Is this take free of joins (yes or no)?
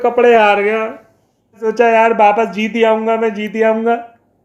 no